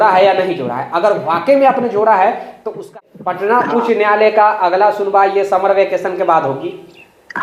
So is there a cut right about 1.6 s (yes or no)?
no